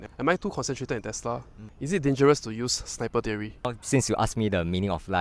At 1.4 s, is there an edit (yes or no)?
no